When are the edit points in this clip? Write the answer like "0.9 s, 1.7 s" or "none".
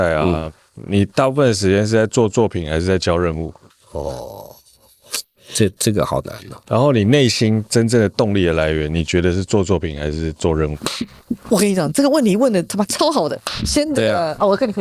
none